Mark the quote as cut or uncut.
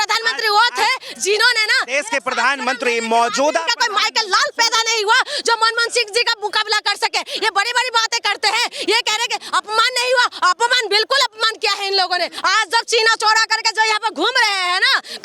cut